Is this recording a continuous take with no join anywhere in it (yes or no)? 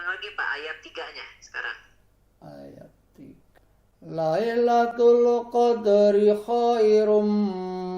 no